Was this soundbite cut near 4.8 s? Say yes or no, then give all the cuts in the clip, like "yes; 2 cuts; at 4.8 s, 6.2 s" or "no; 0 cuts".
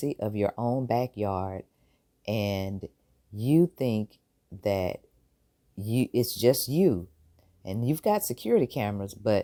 no; 0 cuts